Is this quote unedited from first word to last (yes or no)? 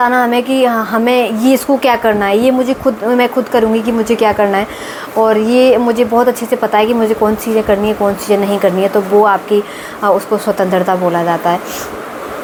yes